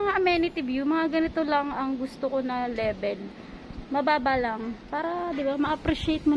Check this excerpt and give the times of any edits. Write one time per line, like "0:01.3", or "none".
none